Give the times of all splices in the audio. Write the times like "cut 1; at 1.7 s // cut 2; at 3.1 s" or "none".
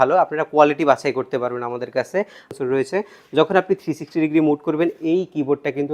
cut 1; at 2.5 s